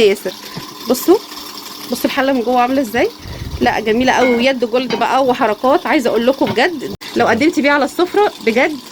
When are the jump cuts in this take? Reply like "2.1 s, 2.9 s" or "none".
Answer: 6.8 s